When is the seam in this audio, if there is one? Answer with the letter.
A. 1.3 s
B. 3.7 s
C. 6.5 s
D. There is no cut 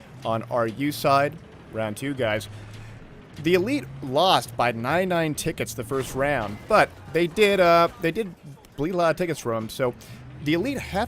A